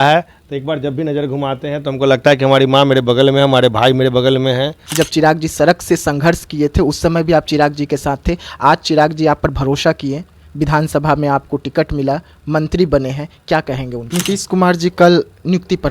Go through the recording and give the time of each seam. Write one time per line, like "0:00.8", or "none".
0:04.8
0:14.0